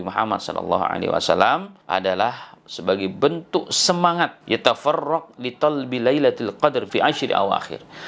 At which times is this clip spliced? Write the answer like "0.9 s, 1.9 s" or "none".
1.7 s, 4.4 s, 6.9 s